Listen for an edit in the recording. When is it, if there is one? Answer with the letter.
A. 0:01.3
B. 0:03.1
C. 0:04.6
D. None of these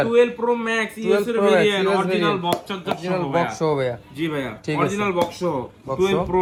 D